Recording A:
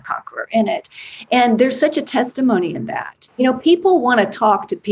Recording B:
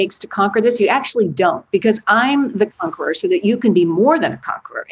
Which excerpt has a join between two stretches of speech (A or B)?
A